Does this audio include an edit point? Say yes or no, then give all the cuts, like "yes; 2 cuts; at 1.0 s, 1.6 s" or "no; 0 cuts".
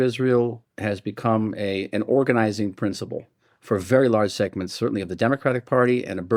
no; 0 cuts